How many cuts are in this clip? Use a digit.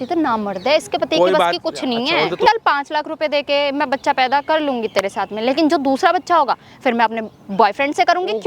1